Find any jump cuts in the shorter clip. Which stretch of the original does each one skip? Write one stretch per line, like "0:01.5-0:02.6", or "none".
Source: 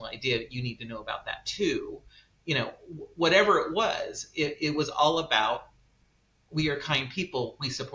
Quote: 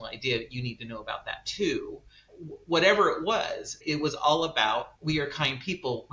0:02.3-0:02.8
0:04.3-0:04.5
0:05.7-0:06.4